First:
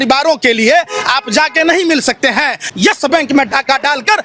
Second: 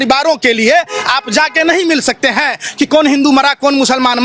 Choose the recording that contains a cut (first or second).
first